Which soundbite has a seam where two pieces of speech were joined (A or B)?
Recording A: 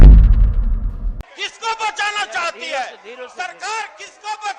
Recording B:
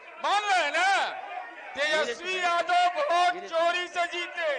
A